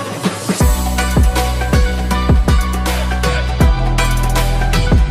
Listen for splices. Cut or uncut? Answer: uncut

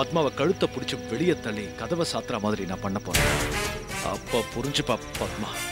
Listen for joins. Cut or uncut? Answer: uncut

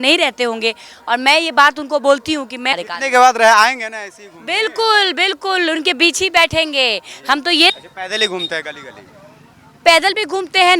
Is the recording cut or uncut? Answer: cut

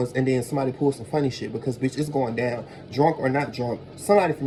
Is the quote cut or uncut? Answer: uncut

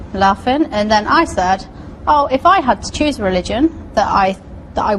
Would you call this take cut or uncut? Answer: uncut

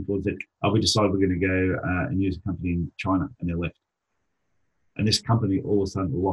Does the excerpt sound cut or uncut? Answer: uncut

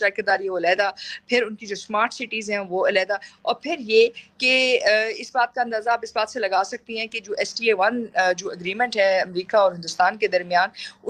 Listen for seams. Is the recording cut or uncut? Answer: uncut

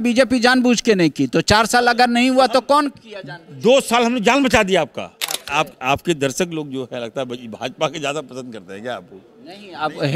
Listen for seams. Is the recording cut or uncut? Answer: cut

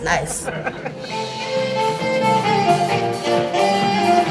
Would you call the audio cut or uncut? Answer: cut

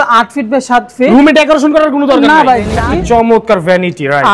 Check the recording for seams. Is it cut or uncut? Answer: cut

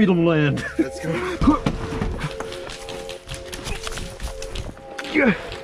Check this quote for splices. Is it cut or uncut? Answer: cut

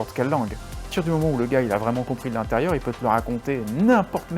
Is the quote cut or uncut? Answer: cut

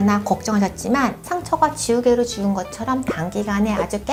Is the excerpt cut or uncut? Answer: uncut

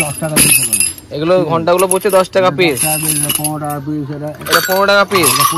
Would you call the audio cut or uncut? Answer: uncut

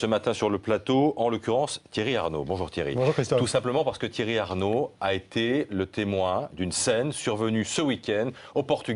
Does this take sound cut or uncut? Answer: uncut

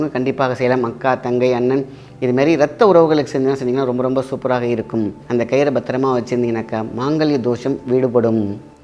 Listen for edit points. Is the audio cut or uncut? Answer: cut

